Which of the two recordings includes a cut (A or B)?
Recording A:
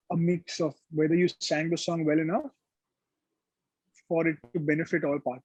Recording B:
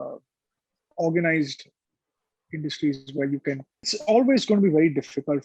B